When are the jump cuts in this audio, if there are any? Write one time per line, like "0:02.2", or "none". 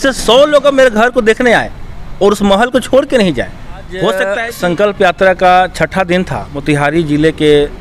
0:04.4
0:06.5

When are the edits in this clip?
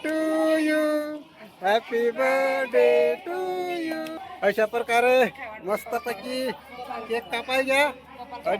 0:04.2

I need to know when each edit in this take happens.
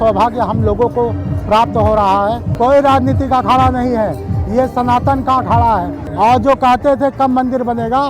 0:02.5
0:06.0

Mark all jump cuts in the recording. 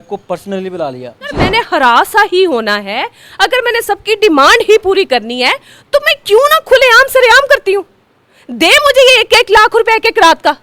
0:01.4

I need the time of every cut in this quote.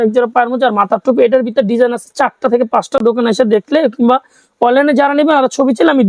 none

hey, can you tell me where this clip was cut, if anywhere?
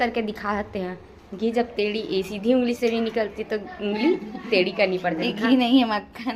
none

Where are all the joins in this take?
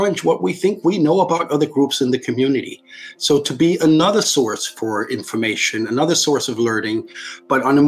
none

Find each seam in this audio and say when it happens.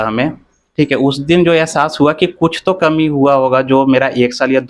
none

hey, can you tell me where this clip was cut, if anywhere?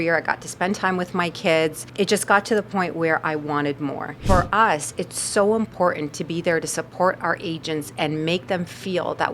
0:01.8
0:04.2

